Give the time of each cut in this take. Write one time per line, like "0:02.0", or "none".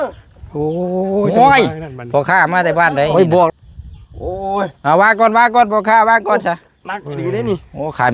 0:02.0